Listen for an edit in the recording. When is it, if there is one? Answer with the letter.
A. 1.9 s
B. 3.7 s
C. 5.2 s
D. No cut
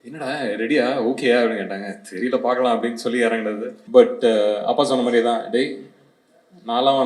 B